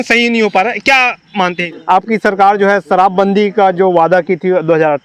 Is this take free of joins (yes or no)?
no